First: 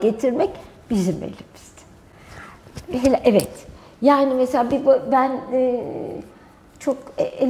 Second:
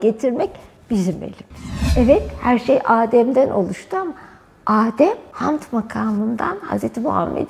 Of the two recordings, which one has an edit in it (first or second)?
second